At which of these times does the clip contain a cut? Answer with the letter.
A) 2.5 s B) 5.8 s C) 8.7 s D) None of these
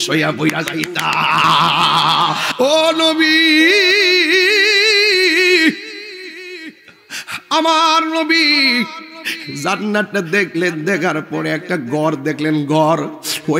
A